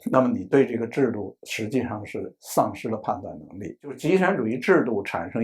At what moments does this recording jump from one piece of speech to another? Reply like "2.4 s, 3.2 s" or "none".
4.0 s